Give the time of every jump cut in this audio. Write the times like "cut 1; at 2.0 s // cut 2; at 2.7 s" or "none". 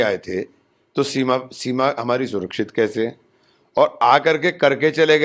none